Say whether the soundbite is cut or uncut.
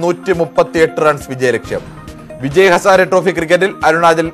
uncut